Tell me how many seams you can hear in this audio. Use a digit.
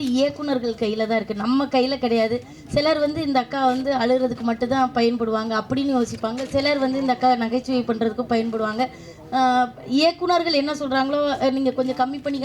0